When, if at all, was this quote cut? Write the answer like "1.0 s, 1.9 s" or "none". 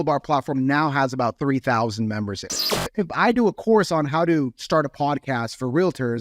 2.5 s